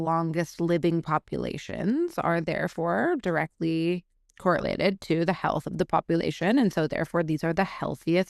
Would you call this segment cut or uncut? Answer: uncut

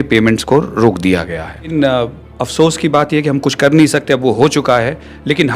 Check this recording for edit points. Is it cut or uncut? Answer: cut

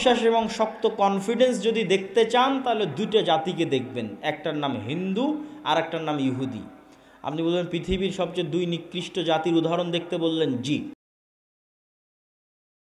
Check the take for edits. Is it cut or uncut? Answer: uncut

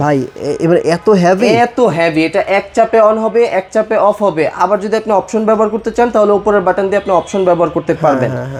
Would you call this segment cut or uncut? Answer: uncut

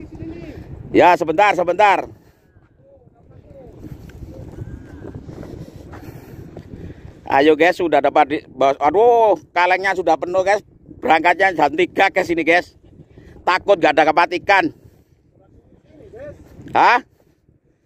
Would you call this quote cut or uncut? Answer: uncut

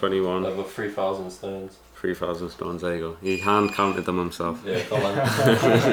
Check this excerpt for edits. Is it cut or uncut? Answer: uncut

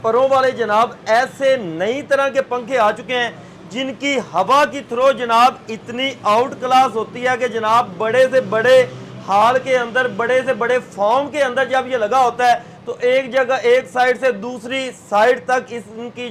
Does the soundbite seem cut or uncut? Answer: uncut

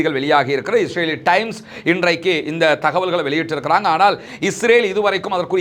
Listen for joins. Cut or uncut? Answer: uncut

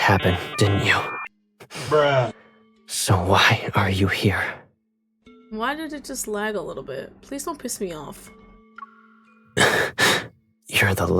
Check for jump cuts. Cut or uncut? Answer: uncut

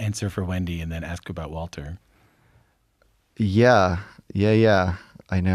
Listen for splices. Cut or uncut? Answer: uncut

